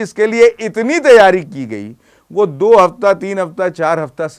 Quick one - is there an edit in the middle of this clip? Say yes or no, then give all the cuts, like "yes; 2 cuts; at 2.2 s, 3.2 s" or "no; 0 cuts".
no; 0 cuts